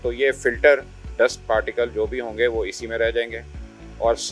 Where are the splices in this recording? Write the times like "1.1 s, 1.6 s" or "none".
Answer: 1.1 s

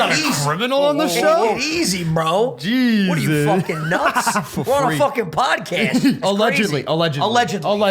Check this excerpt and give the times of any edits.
6.2 s

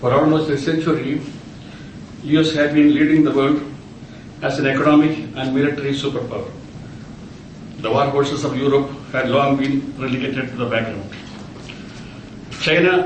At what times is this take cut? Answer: 9.7 s

